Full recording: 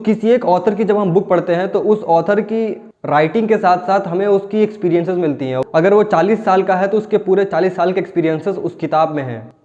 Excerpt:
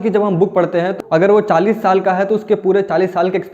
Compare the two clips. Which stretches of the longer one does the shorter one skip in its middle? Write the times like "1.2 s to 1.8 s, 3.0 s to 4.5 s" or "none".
1.7 s to 5.6 s